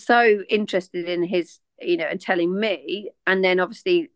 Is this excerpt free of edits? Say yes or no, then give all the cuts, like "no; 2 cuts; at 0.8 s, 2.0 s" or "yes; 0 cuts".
yes; 0 cuts